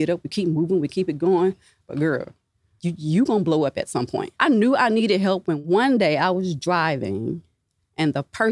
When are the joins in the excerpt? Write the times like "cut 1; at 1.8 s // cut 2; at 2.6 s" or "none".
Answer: cut 1; at 2.7 s // cut 2; at 4.2 s // cut 3; at 5.6 s